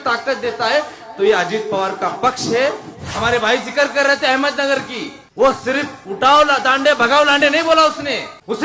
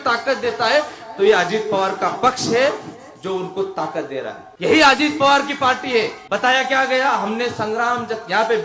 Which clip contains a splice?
first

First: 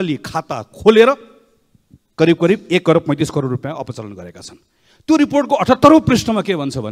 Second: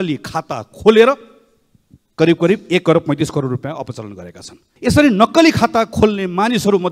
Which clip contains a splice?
second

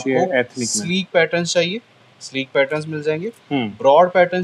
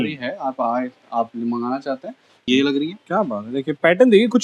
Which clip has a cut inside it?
second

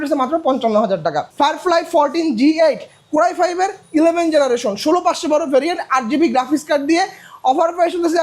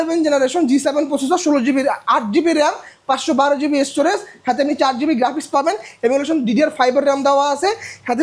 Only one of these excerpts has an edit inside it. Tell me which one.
first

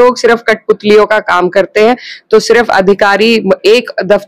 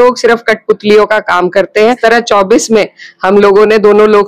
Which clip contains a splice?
second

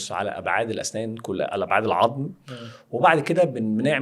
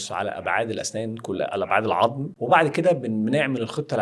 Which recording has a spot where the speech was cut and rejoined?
second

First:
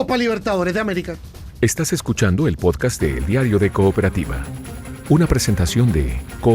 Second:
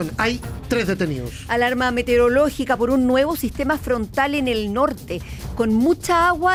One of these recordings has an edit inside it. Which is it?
first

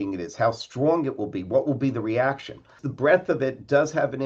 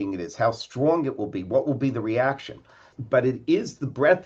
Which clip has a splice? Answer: first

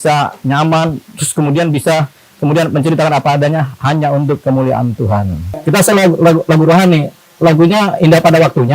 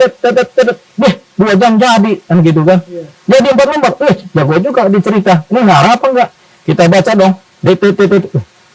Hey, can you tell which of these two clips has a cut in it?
first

